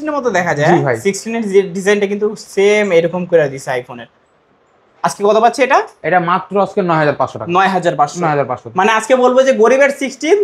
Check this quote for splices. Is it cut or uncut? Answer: uncut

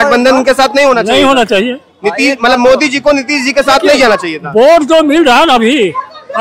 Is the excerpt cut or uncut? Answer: uncut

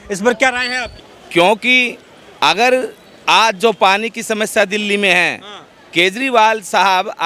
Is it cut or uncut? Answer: cut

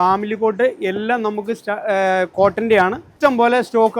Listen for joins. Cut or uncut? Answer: uncut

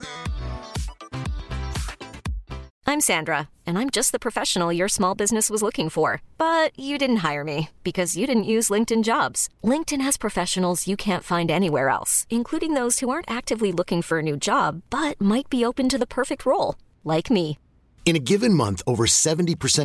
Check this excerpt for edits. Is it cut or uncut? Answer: uncut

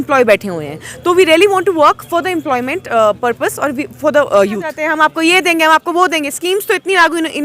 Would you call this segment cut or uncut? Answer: cut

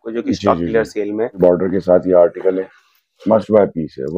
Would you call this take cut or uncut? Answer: cut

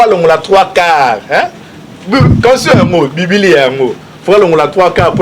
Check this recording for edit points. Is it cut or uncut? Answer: uncut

